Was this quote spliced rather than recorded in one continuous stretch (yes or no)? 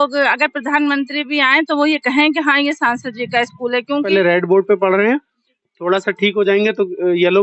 yes